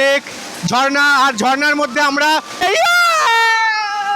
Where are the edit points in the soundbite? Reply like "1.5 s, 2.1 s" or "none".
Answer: 2.6 s